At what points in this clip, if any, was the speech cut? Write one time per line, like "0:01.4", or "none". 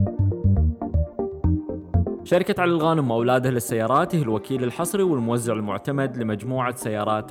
0:02.3